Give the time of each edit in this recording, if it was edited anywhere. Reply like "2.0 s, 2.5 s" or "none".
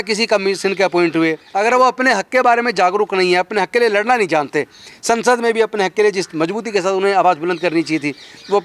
1.4 s